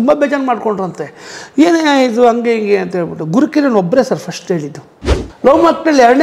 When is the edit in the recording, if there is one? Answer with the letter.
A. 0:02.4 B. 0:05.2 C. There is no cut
B